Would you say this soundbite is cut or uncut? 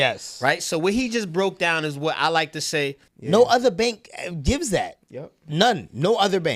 cut